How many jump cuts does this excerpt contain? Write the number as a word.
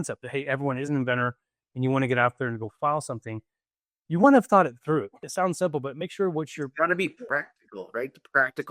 one